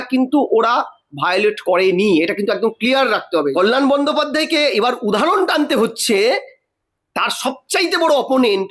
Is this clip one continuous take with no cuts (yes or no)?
no